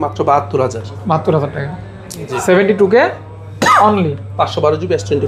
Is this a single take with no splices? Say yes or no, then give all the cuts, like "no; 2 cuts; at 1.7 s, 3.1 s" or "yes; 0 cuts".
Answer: yes; 0 cuts